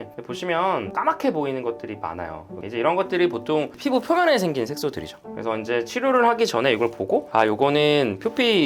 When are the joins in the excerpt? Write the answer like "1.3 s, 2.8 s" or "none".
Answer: 0.9 s, 2.6 s